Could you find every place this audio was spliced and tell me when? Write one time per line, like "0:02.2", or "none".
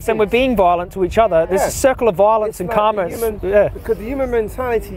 none